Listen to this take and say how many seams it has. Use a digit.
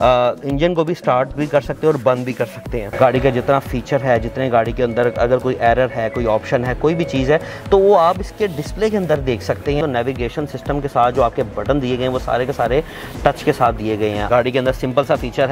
3